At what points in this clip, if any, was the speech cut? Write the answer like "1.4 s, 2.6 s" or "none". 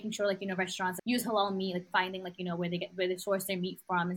1.0 s, 1.9 s